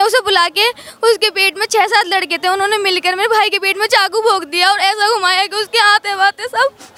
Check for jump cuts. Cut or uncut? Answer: uncut